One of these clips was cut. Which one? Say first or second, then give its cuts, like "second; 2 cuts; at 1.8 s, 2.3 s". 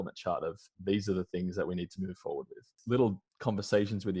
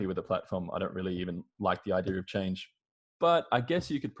first; 2 cuts; at 2.7 s, 3.3 s